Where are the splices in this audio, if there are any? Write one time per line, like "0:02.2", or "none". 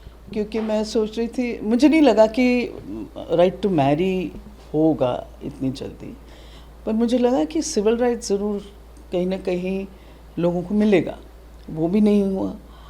none